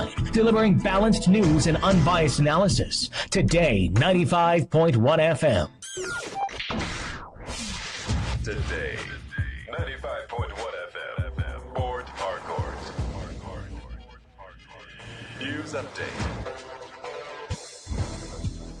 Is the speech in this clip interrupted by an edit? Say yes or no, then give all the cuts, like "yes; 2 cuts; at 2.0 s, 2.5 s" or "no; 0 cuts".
yes; 1 cut; at 5.9 s